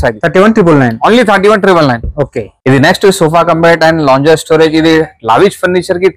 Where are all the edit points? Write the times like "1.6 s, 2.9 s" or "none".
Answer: none